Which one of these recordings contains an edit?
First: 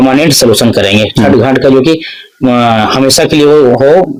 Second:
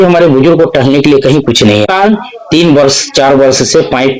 second; 1 cut; at 2.1 s

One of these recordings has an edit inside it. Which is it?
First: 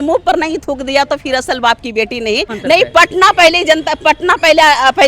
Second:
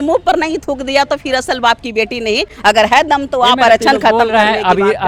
first; 1 cut; at 2.5 s

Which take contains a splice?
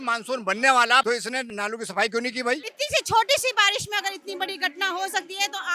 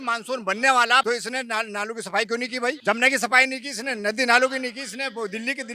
first; 2 cuts; at 1.5 s, 2.6 s

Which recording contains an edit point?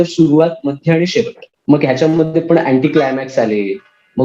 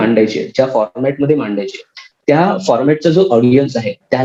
first; 1 cut; at 1.5 s

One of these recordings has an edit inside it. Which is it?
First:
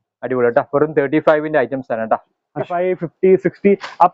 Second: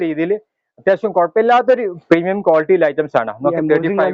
first; 1 cut; at 2.7 s

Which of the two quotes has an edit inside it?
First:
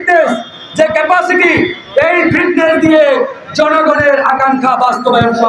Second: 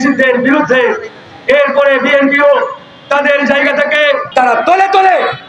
second; 1 cut; at 4.2 s

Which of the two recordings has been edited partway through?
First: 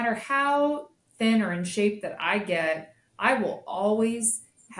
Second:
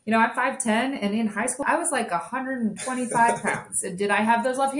second; 1 cut; at 1.6 s

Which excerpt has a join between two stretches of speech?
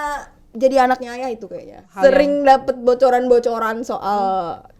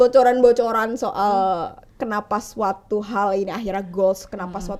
first; 1 cut; at 1.8 s

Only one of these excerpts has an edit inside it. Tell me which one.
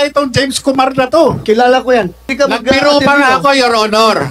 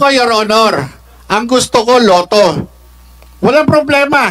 first; 1 cut; at 2.2 s

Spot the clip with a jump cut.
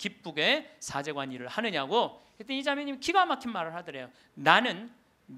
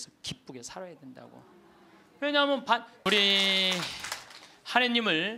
second; 1 cut; at 2.9 s

